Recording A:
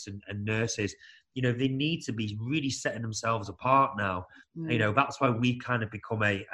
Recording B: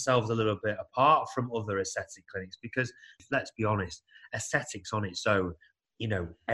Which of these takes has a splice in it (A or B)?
B